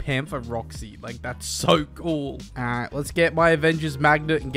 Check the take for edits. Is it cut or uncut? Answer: cut